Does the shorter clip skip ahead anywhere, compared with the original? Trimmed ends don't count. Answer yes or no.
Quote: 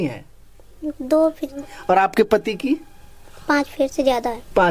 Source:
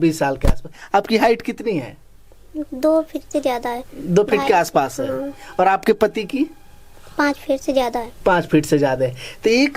yes